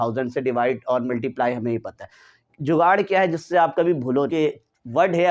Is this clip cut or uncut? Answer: cut